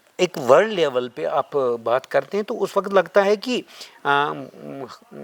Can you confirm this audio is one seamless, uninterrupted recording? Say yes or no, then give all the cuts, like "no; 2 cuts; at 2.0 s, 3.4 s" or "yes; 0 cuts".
yes; 0 cuts